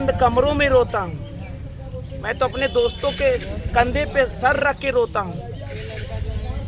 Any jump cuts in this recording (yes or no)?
no